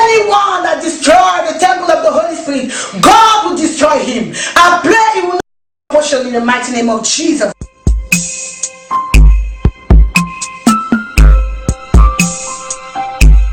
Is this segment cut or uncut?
uncut